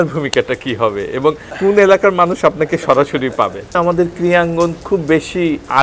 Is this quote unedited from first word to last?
no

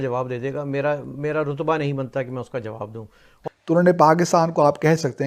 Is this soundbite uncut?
no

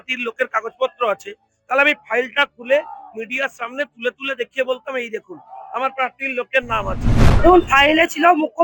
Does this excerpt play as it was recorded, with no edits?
no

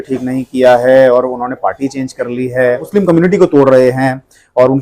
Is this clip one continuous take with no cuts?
no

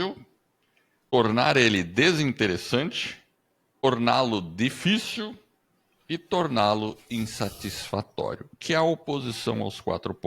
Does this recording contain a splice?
yes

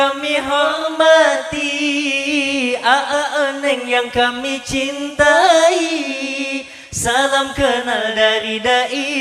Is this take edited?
no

